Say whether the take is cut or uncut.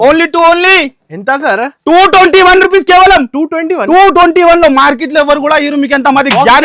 uncut